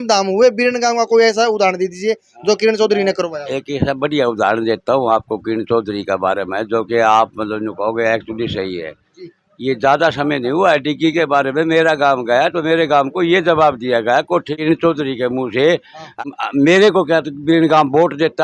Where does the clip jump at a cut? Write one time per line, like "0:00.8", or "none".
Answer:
0:14.5
0:16.1